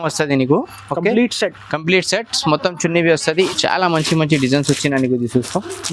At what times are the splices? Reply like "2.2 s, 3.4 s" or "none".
3.5 s